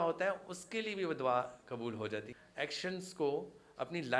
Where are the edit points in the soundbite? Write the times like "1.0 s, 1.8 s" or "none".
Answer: 2.3 s